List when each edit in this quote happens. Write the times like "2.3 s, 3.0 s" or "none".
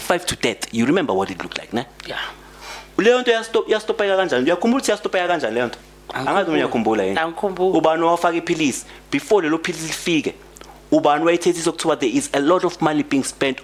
none